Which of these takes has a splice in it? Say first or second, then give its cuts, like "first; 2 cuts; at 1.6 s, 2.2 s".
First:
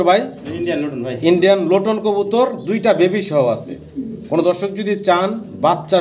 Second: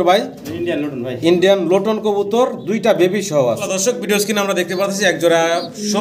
second; 1 cut; at 3.6 s